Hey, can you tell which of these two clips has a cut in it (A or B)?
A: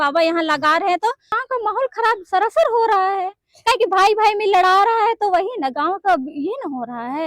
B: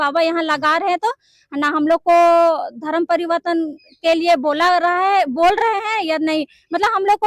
A